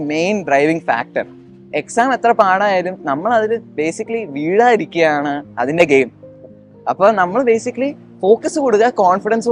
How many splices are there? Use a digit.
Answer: 0